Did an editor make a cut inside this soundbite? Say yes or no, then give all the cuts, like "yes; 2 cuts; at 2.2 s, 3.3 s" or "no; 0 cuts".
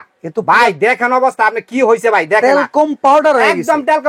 no; 0 cuts